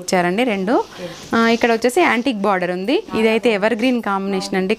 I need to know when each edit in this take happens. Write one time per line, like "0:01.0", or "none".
0:03.1